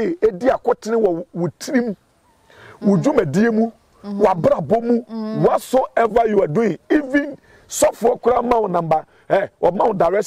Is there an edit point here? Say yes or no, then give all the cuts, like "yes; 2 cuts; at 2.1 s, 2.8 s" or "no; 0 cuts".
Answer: no; 0 cuts